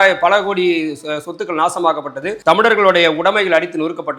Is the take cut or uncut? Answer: cut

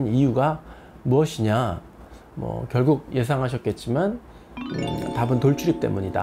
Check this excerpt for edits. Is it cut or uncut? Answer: uncut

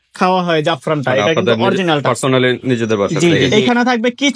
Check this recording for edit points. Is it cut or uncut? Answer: cut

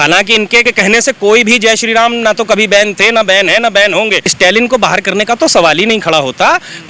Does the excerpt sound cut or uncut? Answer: cut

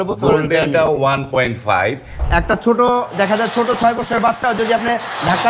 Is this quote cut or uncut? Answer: cut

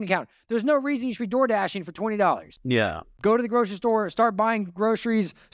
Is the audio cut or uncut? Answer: uncut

